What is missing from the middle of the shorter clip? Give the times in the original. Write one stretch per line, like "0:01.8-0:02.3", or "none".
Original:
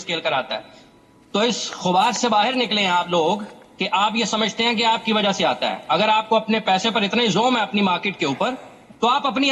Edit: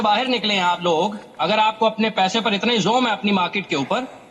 0:03.8-0:06.0